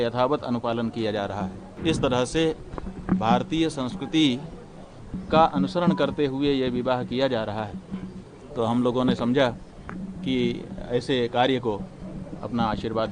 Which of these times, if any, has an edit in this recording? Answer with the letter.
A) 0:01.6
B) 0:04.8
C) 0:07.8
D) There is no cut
A